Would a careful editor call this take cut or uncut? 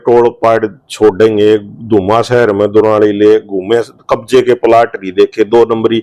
uncut